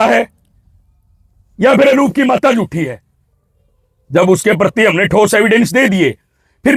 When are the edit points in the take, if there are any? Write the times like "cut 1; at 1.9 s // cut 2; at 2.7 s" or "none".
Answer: none